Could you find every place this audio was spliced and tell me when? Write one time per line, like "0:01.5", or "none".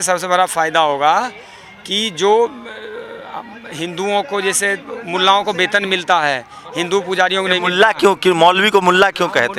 none